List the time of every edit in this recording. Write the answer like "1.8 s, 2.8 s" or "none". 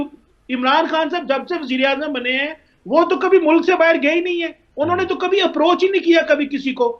none